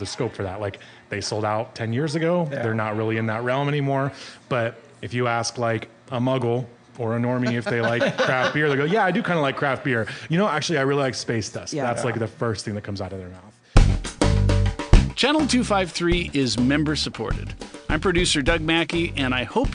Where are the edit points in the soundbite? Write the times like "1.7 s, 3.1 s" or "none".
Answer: 13.6 s